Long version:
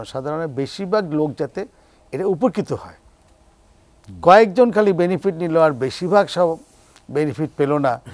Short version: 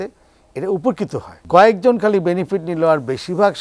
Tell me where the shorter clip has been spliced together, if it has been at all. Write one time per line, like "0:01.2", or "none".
0:01.3